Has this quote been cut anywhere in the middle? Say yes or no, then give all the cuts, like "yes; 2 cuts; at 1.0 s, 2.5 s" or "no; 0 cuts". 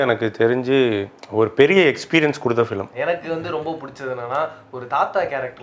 yes; 1 cut; at 2.9 s